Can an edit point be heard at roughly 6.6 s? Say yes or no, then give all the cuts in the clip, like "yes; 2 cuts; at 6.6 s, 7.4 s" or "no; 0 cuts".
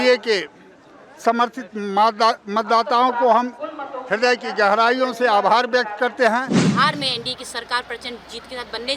yes; 1 cut; at 6.6 s